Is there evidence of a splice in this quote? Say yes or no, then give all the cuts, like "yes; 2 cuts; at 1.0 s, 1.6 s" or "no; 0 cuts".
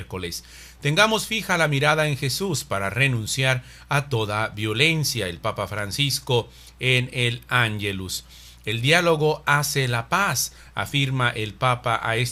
no; 0 cuts